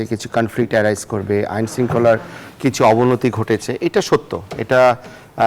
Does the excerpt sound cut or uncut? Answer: uncut